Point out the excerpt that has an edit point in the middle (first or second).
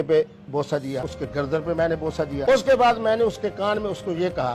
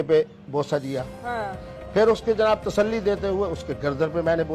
first